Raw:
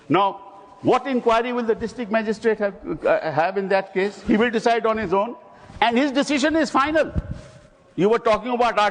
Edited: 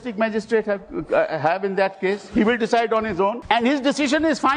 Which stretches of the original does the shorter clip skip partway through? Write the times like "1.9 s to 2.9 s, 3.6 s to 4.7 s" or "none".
5.3 s to 5.7 s